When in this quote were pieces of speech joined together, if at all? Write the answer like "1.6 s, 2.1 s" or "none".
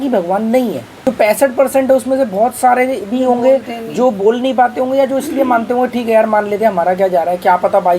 1.0 s